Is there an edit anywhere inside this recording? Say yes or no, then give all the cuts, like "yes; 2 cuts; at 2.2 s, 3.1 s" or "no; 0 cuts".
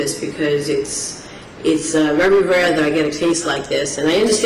no; 0 cuts